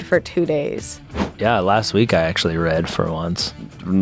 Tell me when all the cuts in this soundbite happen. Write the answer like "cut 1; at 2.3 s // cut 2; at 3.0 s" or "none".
cut 1; at 1.1 s